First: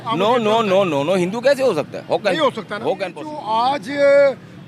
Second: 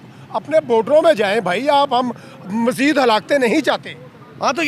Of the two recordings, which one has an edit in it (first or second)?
first